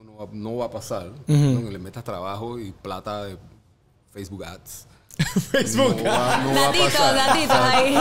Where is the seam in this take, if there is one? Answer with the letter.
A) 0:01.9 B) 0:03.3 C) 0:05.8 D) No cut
D